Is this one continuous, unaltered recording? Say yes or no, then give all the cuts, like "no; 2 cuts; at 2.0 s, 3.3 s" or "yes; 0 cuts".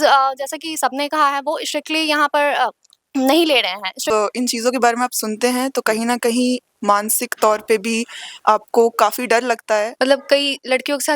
no; 2 cuts; at 4.0 s, 9.9 s